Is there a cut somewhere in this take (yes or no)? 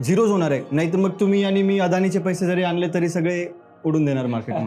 no